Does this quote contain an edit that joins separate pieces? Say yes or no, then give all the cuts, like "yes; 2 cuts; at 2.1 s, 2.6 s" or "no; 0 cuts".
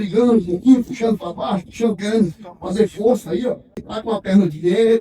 yes; 1 cut; at 3.9 s